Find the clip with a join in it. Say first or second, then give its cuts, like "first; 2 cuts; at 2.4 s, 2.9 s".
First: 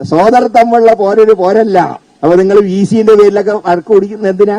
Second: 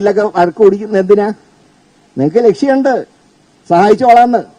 first; 1 cut; at 2.0 s